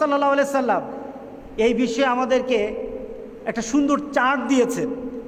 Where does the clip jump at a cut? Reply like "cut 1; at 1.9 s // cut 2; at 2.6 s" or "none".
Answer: none